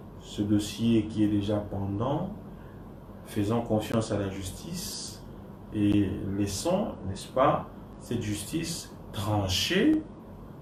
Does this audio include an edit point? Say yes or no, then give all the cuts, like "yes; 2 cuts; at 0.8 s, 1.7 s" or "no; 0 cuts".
no; 0 cuts